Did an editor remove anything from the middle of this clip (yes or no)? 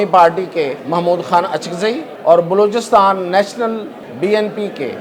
yes